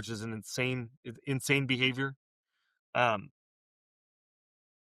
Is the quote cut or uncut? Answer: uncut